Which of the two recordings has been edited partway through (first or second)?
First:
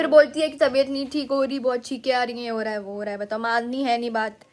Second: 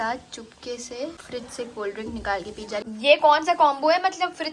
second